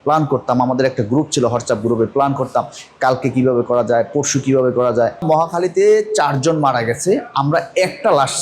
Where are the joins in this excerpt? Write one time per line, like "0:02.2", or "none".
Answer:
0:05.2